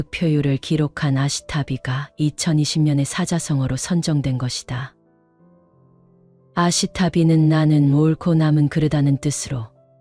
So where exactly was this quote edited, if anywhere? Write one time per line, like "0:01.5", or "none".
0:05.0
0:06.4